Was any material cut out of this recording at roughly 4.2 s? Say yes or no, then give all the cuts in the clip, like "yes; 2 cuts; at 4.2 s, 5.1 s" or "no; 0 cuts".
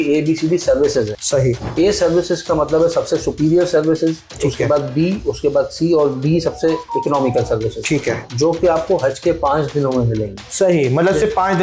no; 2 cuts; at 1.2 s, 8.2 s